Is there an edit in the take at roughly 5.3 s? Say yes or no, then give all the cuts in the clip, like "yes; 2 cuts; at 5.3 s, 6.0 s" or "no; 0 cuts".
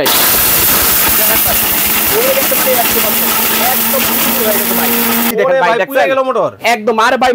yes; 1 cut; at 5.3 s